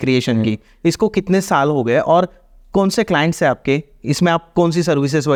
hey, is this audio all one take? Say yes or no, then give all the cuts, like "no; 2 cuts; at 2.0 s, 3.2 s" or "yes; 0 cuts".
yes; 0 cuts